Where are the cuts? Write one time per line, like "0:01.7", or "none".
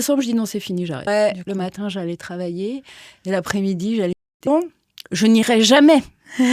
0:01.1
0:04.5